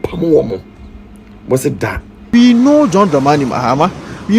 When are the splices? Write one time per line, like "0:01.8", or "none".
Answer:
0:02.3